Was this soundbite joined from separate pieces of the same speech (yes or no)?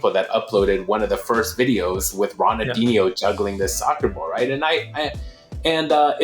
no